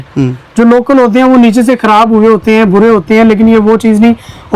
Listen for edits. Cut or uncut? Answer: uncut